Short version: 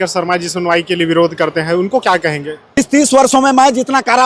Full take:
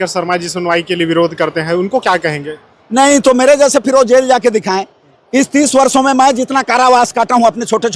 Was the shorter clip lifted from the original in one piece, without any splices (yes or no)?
no